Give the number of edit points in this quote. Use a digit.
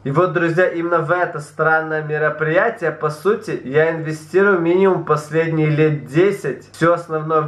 0